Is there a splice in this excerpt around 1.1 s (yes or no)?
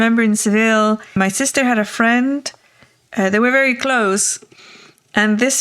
yes